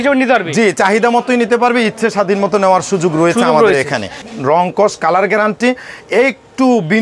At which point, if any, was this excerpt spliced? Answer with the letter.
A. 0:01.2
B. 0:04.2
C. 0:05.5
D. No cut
B